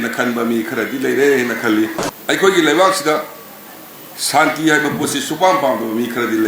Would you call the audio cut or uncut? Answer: cut